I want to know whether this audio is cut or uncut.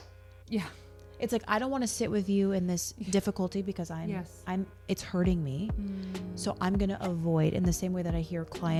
uncut